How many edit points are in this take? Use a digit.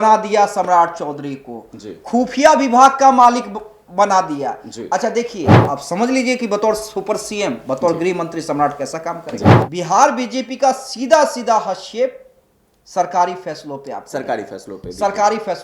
2